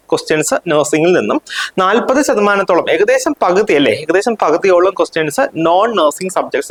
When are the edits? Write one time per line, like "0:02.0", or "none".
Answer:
none